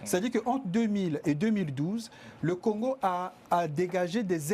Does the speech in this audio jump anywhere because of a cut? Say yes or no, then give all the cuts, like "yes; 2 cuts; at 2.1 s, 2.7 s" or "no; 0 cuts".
no; 0 cuts